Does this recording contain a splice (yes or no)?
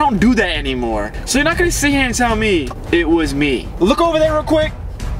yes